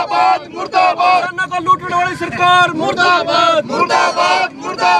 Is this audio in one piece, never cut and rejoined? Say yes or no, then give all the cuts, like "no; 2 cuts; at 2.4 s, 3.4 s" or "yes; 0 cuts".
no; 1 cut; at 1.4 s